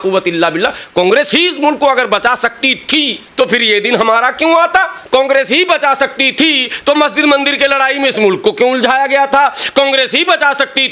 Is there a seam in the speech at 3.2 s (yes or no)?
yes